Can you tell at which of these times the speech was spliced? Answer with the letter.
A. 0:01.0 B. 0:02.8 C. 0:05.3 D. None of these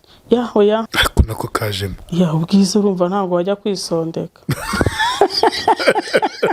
A